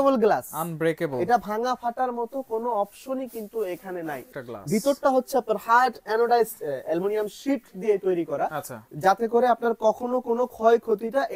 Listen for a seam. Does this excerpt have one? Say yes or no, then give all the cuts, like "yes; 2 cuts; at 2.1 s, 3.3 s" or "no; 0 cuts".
yes; 1 cut; at 4.3 s